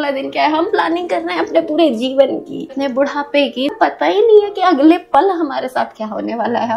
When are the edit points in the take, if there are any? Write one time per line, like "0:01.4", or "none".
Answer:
none